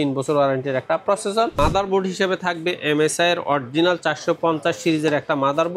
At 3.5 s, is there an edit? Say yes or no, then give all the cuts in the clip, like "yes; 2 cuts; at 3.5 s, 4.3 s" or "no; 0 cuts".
no; 1 cut; at 1.6 s